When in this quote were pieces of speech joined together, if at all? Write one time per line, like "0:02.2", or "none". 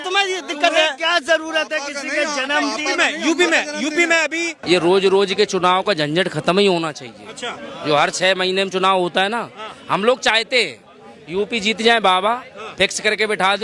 0:04.5